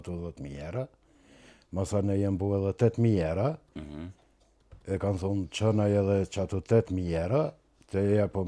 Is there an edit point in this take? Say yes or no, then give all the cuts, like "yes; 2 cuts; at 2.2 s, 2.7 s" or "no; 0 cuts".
yes; 1 cut; at 3.7 s